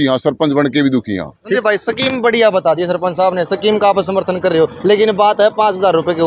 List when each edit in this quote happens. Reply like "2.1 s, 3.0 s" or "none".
1.3 s